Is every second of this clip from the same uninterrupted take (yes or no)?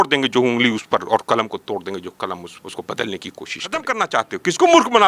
no